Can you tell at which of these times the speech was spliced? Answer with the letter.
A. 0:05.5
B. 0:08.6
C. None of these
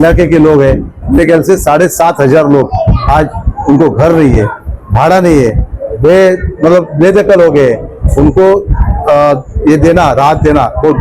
C